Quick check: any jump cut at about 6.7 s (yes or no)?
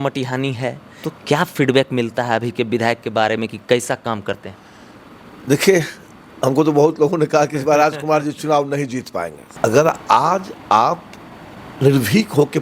no